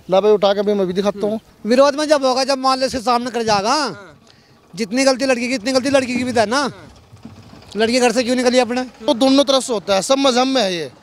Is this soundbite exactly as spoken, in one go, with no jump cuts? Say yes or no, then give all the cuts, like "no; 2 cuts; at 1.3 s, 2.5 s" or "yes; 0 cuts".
no; 2 cuts; at 1.5 s, 9.1 s